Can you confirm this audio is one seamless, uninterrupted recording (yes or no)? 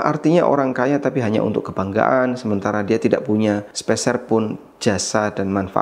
no